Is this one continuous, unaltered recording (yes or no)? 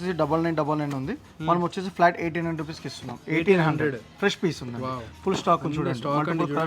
yes